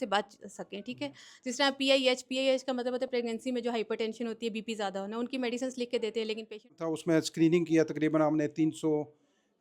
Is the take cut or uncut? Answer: cut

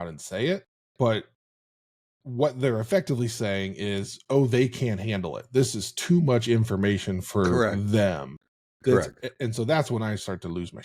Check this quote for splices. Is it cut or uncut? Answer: uncut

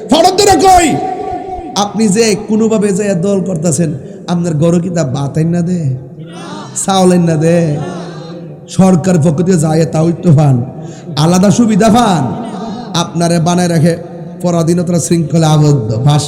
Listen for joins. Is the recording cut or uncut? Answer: uncut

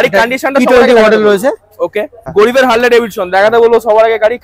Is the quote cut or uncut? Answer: cut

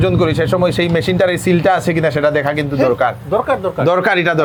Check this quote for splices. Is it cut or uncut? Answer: uncut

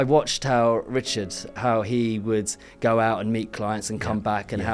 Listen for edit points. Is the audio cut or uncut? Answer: cut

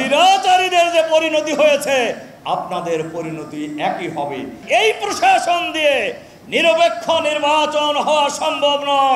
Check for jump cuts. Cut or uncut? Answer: cut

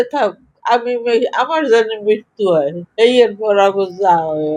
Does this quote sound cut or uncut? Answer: uncut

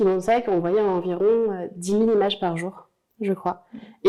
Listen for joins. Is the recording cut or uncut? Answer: uncut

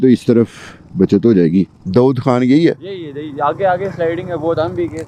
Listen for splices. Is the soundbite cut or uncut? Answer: cut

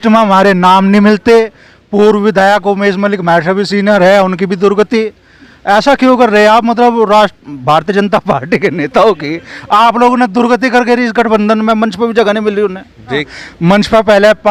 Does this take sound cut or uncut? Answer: cut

